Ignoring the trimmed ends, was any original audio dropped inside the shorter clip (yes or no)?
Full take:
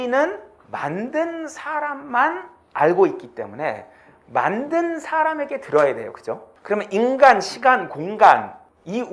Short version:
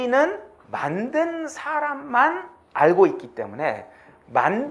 no